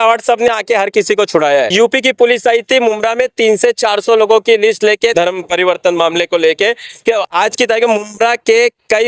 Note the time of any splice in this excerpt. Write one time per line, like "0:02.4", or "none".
0:01.7
0:05.1

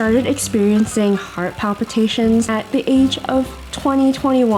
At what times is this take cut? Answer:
0:02.5

